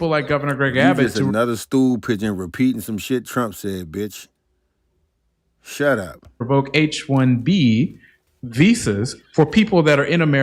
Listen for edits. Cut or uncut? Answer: uncut